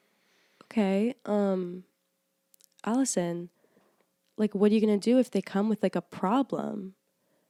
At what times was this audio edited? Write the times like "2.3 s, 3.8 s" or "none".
none